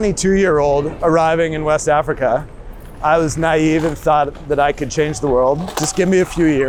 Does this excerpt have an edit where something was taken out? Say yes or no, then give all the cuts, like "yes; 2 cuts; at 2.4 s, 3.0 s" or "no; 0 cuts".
no; 0 cuts